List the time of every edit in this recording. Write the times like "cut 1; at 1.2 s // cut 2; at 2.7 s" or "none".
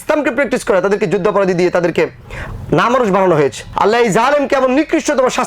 cut 1; at 3.6 s